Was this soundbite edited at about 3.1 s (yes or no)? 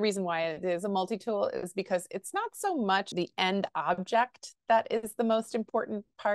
yes